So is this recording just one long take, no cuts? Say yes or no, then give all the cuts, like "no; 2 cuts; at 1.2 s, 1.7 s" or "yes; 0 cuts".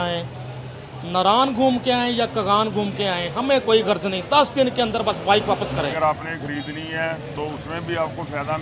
no; 1 cut; at 5.9 s